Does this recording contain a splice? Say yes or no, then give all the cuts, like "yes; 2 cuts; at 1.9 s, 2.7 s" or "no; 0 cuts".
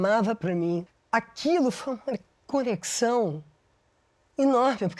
yes; 1 cut; at 0.9 s